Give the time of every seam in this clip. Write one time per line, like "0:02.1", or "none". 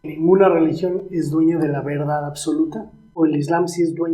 0:03.1